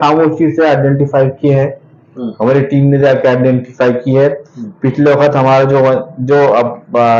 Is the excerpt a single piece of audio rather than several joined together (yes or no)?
yes